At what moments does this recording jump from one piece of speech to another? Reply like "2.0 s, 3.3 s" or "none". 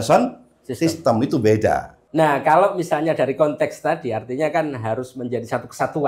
2.0 s